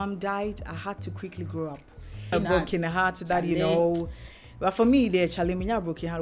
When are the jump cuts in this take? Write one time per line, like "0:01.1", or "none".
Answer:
0:02.3